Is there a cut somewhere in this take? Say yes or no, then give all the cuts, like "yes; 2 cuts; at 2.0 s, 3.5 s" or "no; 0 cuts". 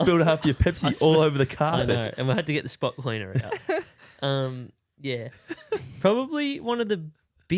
no; 0 cuts